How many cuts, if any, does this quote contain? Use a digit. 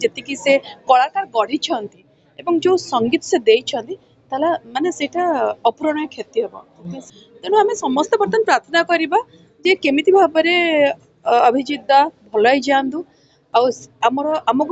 1